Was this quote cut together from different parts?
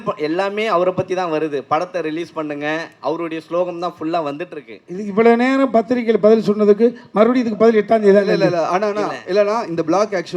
no; 0 cuts

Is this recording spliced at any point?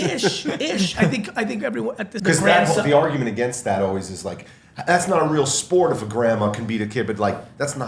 yes; 1 cut; at 2.1 s

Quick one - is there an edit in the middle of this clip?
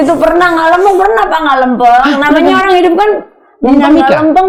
no; 0 cuts

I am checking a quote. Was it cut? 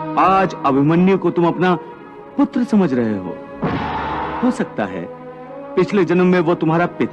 yes; 1 cut; at 4.3 s

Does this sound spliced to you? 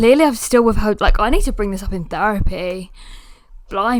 no; 0 cuts

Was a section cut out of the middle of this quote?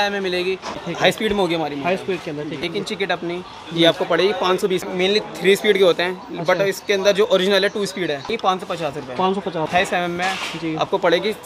yes; 5 cuts; at 0.8 s, 2.6 s, 4.8 s, 8.3 s, 9.7 s

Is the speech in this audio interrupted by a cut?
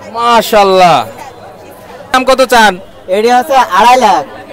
yes; 1 cut; at 2.1 s

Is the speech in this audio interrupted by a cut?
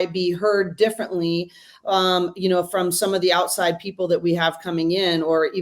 no; 0 cuts

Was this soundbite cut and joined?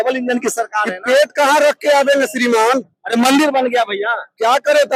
no; 0 cuts

